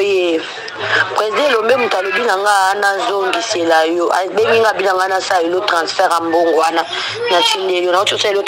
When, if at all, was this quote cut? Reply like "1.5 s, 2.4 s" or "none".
none